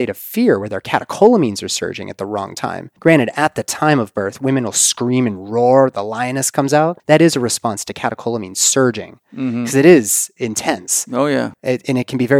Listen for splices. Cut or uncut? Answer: cut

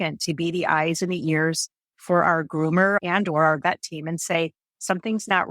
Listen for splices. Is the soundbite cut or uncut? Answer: cut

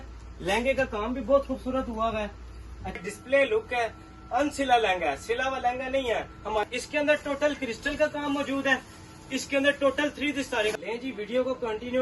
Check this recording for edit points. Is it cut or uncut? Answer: cut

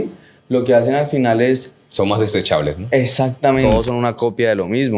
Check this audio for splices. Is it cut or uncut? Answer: cut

